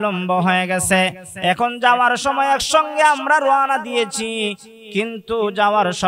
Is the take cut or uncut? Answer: uncut